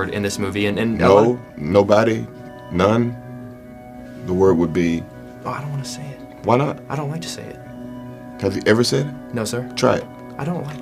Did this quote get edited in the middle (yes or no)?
no